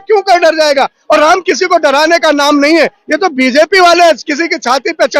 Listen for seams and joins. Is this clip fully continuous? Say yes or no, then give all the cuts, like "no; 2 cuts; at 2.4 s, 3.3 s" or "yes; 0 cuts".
no; 1 cut; at 1.0 s